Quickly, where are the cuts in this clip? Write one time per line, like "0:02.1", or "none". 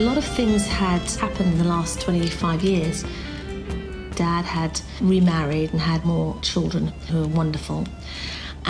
none